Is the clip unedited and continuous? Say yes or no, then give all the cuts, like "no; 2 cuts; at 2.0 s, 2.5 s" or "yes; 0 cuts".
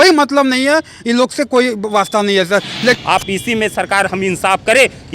no; 1 cut; at 3.0 s